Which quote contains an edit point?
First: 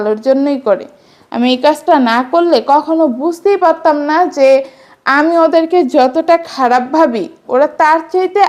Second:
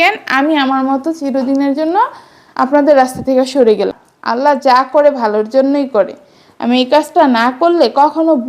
second; 1 cut; at 4.0 s

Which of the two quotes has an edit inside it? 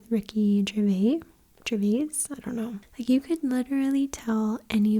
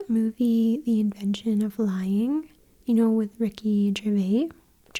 first; 1 cut; at 2.9 s

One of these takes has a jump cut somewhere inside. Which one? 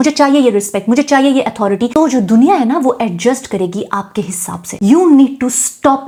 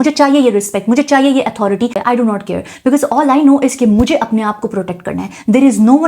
second; 1 cut; at 1.9 s

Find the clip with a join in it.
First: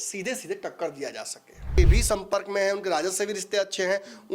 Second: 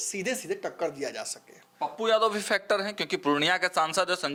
first; 1 cut; at 1.8 s

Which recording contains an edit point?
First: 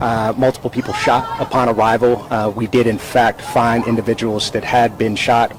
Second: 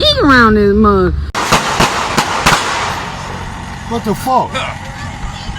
second; 1 cut; at 1.4 s

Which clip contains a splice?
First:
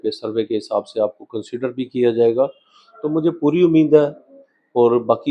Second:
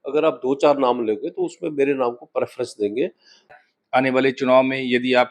second; 1 cut; at 3.5 s

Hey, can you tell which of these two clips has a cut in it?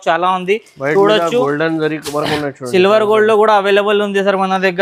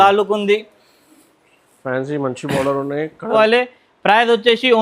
second; 1 cut; at 3.3 s

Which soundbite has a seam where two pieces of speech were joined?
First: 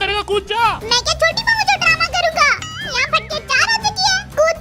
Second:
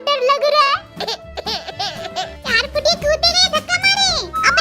second; 1 cut; at 2.4 s

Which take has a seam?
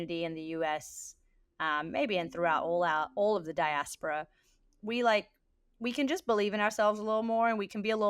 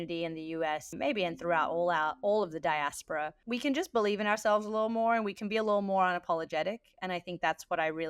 second; 2 cuts; at 0.9 s, 3.4 s

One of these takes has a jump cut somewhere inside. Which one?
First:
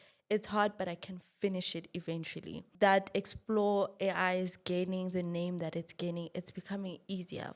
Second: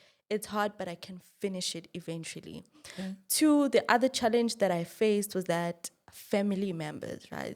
first; 1 cut; at 2.6 s

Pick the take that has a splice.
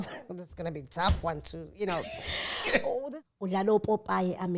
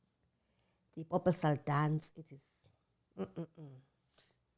first; 1 cut; at 3.0 s

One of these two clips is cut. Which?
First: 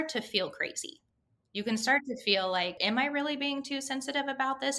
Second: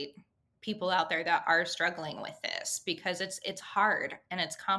first; 2 cuts; at 1.3 s, 2.7 s

